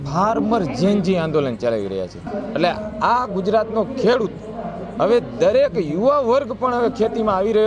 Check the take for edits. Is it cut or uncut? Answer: cut